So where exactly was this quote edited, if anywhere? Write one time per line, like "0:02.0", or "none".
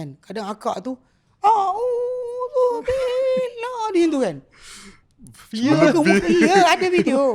none